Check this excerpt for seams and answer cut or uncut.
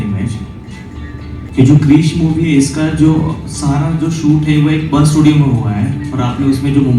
cut